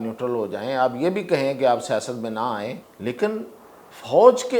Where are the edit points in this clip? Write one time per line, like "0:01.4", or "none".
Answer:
0:02.8

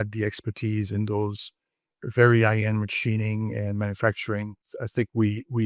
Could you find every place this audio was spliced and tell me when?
0:04.7

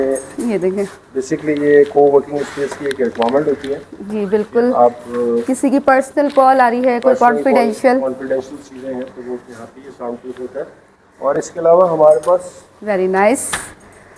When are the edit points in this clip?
none

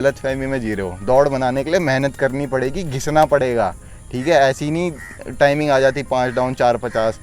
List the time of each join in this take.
none

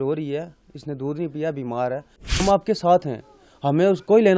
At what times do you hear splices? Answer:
0:02.4

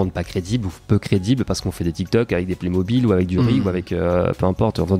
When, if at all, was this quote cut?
none

